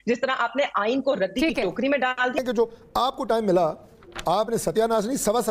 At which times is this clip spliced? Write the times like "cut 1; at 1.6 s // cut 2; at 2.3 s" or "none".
cut 1; at 2.3 s